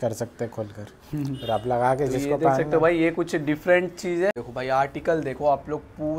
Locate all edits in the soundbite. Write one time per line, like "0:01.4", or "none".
0:04.4

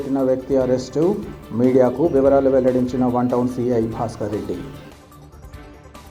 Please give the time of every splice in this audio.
none

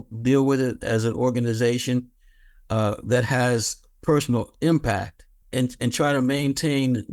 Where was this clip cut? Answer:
0:05.4

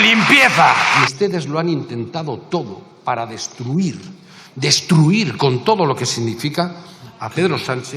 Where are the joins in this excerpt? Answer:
0:01.0

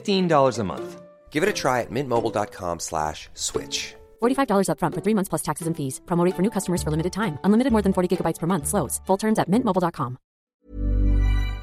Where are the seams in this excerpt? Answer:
0:10.7

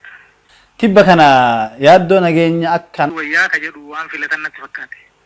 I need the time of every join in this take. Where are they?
0:03.1

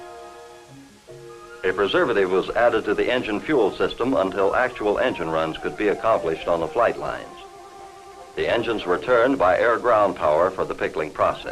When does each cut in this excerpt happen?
0:02.8

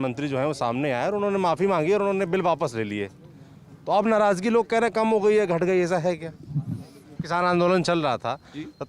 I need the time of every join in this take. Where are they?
0:07.2

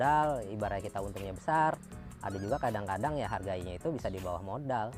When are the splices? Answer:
none

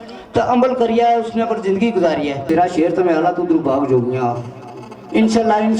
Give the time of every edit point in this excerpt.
0:02.5

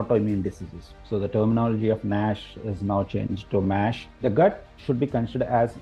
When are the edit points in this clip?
0:01.0
0:04.1

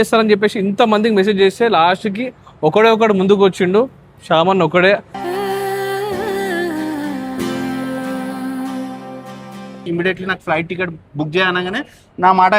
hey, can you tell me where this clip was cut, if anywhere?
0:09.9

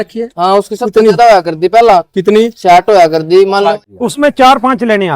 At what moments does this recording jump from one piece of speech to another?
0:03.7

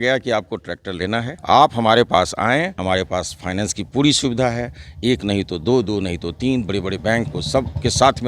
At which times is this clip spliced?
0:01.3
0:02.7

